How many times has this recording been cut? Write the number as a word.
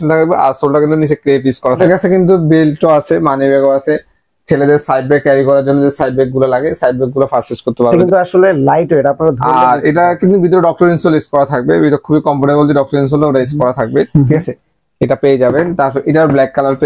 three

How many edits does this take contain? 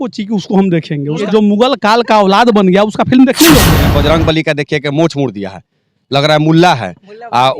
two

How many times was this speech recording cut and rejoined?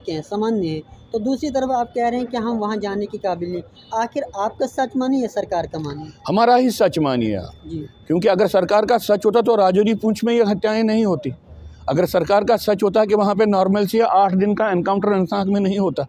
zero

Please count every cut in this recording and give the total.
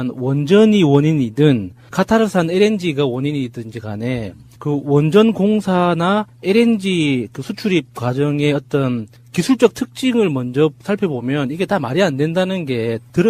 one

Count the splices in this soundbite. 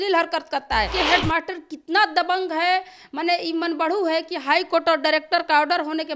one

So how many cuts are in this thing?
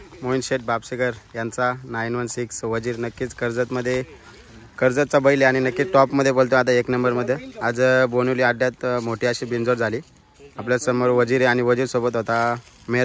zero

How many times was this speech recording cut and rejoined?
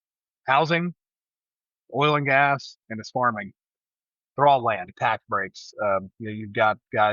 one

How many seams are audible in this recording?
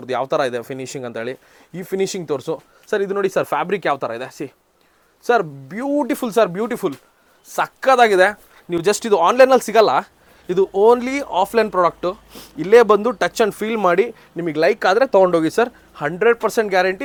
zero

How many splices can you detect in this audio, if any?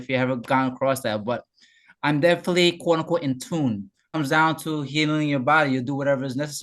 one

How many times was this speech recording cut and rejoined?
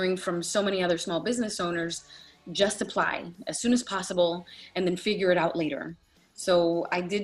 zero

